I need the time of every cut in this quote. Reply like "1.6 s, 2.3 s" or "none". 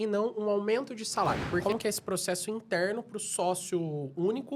1.6 s

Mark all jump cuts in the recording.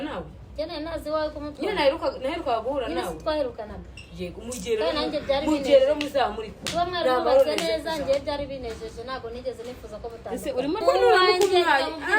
10.8 s

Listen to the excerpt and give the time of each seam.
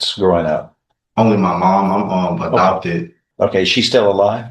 3.2 s

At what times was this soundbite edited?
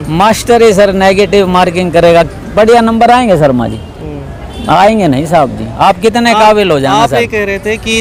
none

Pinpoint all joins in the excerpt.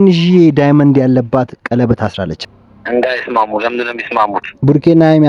2.4 s

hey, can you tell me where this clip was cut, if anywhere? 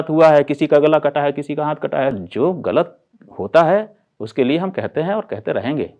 2.2 s

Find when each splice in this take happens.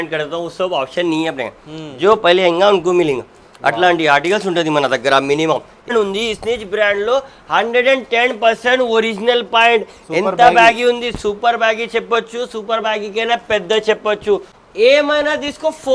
5.9 s, 14.6 s

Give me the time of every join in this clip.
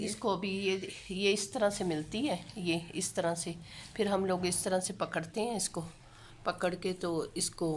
none

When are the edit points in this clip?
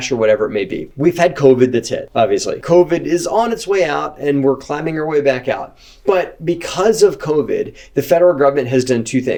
none

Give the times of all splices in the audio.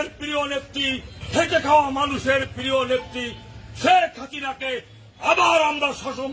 1.1 s

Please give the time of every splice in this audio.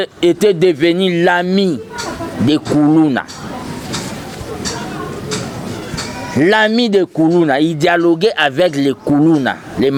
none

